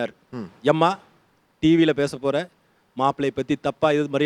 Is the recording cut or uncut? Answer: uncut